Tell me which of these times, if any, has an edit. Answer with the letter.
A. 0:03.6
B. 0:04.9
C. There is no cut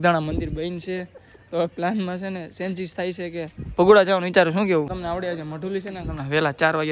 B